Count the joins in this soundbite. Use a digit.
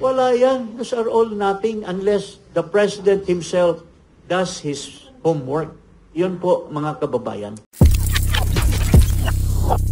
1